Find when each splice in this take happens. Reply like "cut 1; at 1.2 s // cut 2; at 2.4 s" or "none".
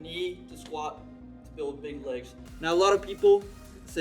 cut 1; at 2.4 s